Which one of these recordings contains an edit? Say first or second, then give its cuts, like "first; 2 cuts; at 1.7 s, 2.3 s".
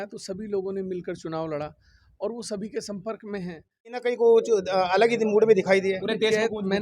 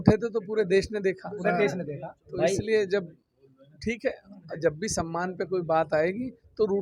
first; 1 cut; at 4.1 s